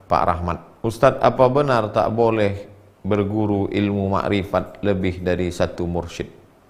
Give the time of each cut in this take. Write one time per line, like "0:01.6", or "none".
none